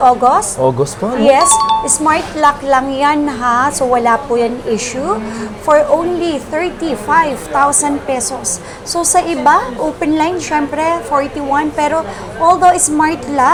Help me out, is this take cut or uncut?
uncut